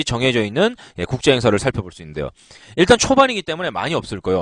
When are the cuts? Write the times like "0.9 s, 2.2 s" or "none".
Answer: none